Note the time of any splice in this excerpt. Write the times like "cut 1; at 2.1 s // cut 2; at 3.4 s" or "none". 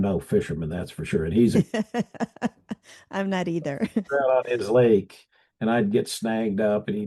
none